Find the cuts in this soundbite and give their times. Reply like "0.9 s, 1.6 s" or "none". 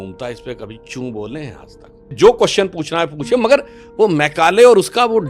2.1 s